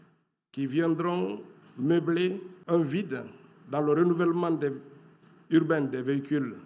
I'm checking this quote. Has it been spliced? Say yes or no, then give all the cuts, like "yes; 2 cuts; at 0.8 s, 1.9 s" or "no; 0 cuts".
yes; 1 cut; at 2.5 s